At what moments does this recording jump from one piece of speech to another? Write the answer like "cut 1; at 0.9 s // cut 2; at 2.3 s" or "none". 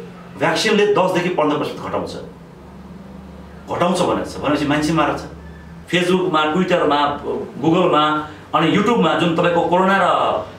cut 1; at 5.7 s